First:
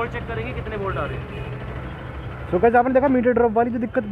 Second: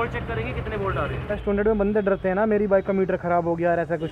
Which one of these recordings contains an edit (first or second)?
second